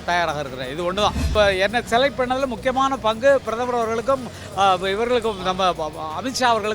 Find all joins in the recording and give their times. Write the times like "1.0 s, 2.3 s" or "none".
1.3 s